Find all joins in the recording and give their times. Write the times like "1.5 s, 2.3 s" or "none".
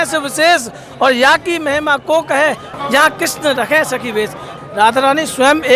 2.7 s, 4.5 s